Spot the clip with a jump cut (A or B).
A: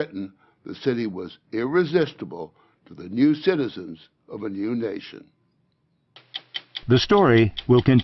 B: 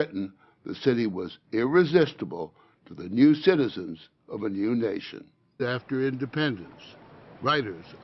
A